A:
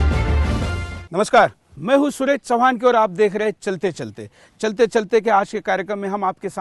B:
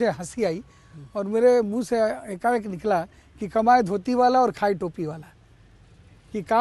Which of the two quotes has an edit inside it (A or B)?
A